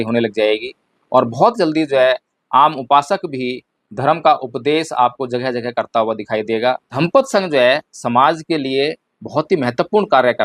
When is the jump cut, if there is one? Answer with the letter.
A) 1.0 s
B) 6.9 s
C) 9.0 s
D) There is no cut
B